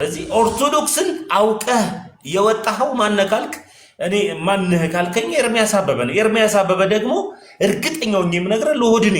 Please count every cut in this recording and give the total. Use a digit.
0